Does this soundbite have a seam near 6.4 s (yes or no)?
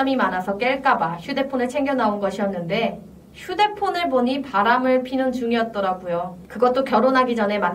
yes